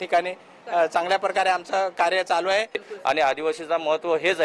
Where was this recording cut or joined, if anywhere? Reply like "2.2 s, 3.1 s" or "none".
2.9 s